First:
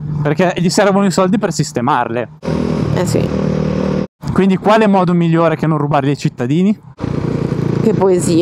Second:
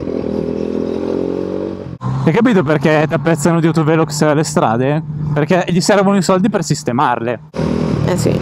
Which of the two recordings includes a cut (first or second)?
second